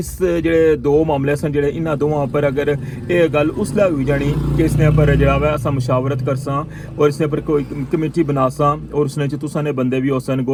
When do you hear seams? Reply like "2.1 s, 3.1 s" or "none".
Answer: none